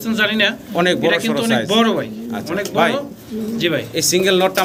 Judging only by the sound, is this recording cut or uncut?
uncut